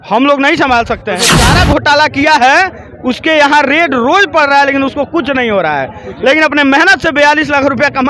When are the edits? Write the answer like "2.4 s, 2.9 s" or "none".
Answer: 1.4 s